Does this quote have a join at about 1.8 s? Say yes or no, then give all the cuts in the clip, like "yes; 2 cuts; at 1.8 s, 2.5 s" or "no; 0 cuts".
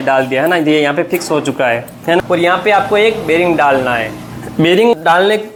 no; 0 cuts